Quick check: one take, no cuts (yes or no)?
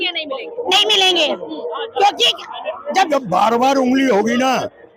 no